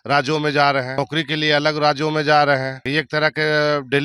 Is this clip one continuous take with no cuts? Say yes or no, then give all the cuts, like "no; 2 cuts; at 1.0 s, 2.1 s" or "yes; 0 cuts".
no; 2 cuts; at 1.0 s, 2.8 s